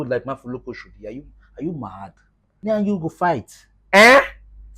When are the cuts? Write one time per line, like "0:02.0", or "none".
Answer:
0:02.6